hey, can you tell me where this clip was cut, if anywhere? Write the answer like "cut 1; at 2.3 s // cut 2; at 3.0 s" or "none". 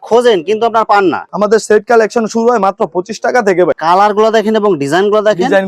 cut 1; at 1.2 s // cut 2; at 3.7 s